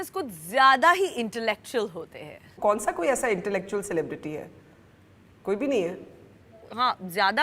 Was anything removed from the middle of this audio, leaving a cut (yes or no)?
no